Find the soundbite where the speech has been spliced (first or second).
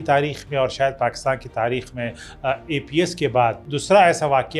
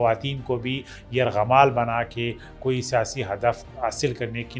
first